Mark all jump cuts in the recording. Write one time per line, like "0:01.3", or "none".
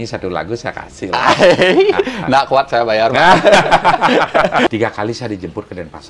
0:04.7